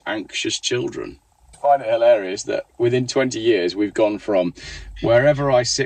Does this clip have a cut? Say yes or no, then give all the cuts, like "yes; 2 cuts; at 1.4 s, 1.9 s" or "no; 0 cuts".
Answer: yes; 1 cut; at 1.5 s